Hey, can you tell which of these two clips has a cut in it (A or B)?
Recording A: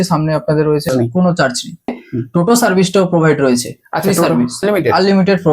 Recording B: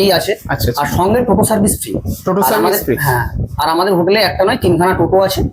A